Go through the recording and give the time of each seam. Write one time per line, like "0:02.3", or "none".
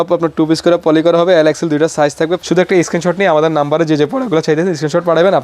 0:02.4